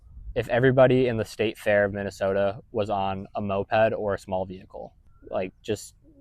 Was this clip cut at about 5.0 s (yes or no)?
yes